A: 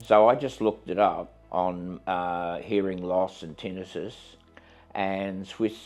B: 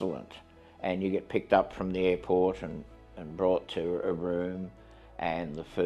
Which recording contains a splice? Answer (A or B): A